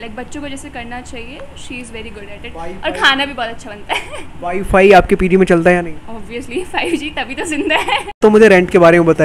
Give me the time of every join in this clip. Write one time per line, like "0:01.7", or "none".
0:08.2